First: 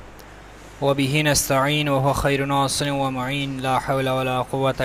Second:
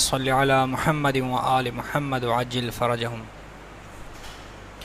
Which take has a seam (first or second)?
second